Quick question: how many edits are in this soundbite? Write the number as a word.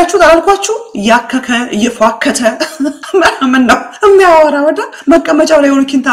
zero